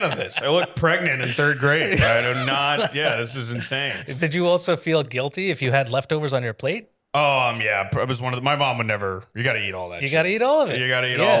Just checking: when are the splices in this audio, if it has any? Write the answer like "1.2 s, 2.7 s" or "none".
6.9 s

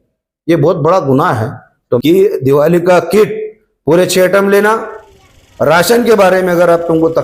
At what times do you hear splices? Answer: 2.0 s

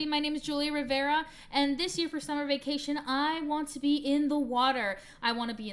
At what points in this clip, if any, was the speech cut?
none

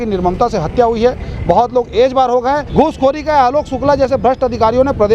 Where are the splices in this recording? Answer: 2.7 s

